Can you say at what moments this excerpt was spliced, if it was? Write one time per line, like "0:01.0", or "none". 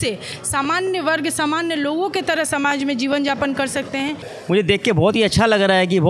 0:04.3